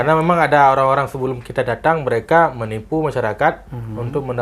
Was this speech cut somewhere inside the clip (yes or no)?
no